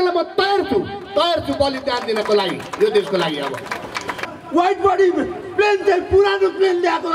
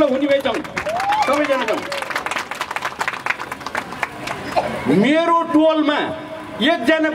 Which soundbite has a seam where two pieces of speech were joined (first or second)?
first